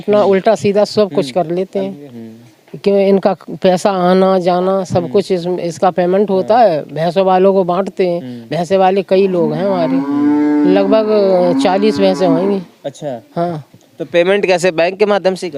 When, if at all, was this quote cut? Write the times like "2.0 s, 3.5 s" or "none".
none